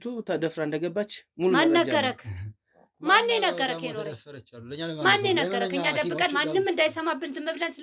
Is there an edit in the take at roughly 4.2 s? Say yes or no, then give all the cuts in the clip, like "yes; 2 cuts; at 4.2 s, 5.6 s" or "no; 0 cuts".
no; 0 cuts